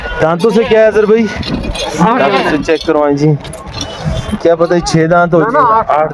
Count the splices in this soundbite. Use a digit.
0